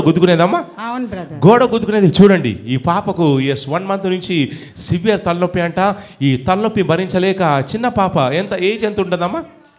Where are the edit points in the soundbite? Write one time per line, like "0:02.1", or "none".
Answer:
none